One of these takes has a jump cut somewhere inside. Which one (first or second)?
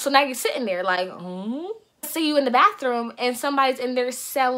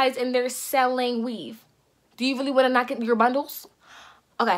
first